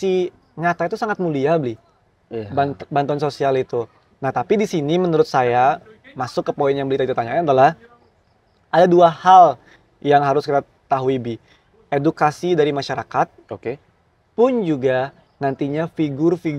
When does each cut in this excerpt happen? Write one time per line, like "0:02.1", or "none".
none